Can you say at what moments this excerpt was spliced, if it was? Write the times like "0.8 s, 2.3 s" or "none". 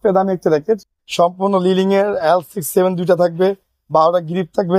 1.0 s